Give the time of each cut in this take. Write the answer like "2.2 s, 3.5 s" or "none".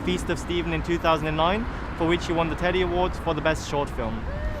3.4 s